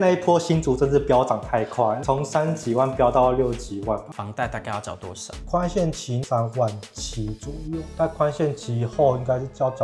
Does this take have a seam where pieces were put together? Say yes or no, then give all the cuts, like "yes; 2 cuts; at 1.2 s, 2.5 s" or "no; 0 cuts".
yes; 2 cuts; at 4.1 s, 6.2 s